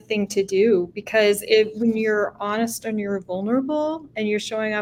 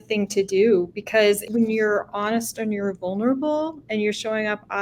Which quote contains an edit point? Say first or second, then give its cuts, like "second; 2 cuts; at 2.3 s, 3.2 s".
second; 1 cut; at 1.4 s